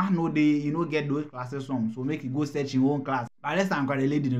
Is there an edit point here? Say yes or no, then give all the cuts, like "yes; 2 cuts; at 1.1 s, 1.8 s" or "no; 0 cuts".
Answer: yes; 1 cut; at 3.3 s